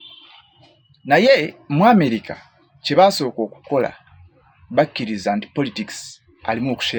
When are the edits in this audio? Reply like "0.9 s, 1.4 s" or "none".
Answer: none